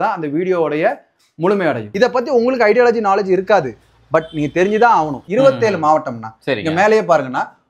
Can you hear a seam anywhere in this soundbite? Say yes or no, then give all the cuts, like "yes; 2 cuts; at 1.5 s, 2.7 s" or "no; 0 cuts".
yes; 2 cuts; at 1.9 s, 5.2 s